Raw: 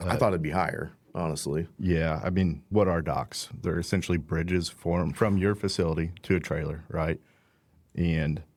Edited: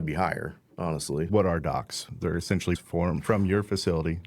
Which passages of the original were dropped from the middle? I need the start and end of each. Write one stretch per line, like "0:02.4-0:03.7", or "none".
0:01.6-0:02.7
0:04.2-0:04.7